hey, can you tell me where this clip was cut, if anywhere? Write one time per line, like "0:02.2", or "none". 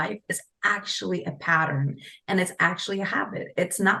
none